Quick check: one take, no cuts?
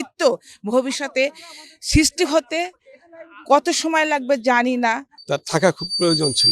no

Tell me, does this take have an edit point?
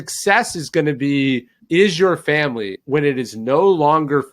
yes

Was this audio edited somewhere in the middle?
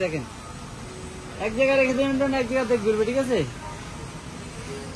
no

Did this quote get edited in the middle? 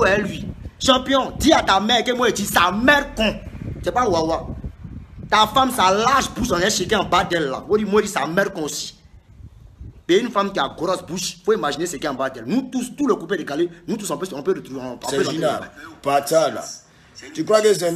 yes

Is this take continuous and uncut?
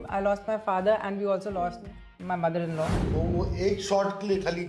no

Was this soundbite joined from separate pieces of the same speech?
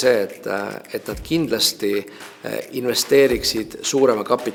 no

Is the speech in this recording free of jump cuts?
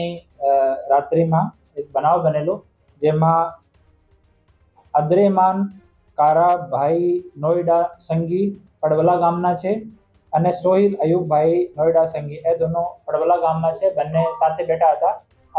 yes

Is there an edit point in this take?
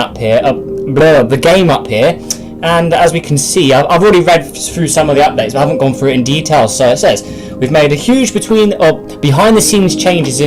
yes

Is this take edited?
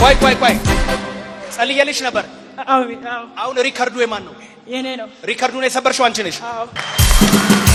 no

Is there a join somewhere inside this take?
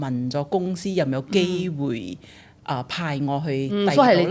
no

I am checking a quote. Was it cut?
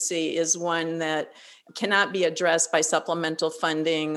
no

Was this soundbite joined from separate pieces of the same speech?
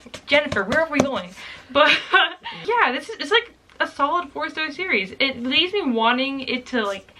no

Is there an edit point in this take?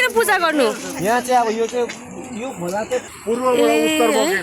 yes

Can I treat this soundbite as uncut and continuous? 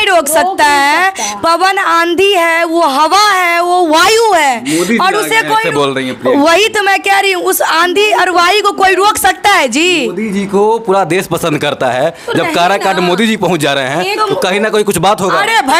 yes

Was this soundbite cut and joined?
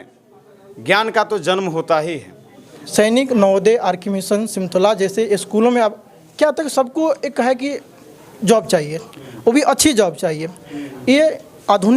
yes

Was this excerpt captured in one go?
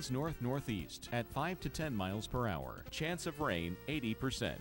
no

